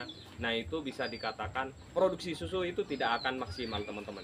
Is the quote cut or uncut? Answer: cut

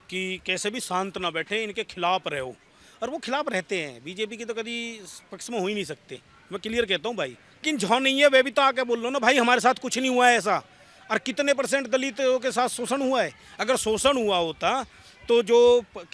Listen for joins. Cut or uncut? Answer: cut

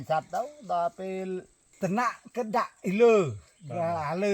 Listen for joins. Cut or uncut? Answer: cut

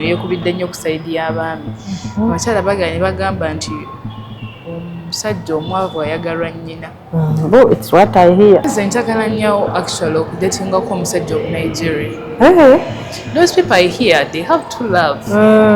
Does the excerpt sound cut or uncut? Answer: cut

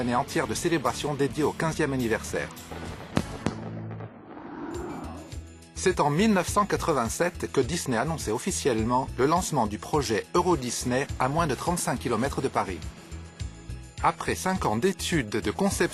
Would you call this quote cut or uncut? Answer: uncut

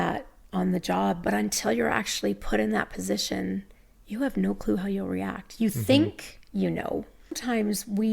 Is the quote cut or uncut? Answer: cut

